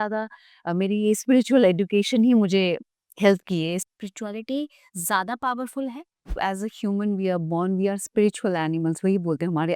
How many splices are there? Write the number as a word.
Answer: two